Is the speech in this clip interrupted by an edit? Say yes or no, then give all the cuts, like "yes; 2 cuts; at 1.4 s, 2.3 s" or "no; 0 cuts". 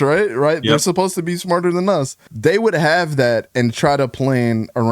yes; 1 cut; at 2.2 s